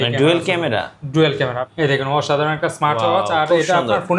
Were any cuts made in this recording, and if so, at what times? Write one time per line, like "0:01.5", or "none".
0:01.6